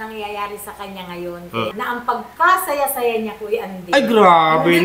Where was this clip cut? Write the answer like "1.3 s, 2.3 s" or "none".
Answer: 1.7 s